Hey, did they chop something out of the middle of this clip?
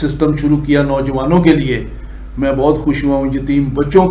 no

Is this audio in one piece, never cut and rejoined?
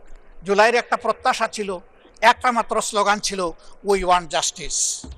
yes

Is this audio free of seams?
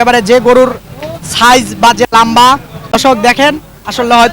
no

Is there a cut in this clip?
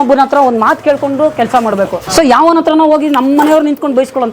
yes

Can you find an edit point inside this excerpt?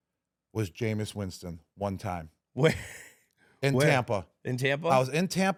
no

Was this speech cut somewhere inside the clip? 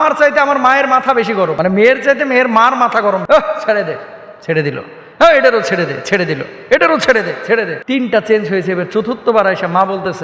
yes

